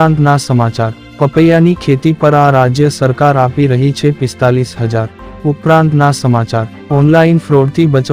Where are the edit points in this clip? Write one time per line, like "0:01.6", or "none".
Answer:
0:01.0
0:05.3
0:06.7